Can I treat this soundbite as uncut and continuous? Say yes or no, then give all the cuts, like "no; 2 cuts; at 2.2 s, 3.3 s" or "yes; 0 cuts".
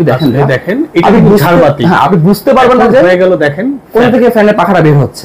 yes; 0 cuts